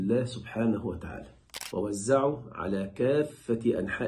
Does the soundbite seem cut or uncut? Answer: cut